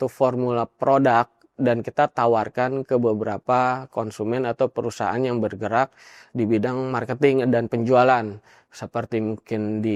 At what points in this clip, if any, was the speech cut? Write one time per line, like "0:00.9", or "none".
none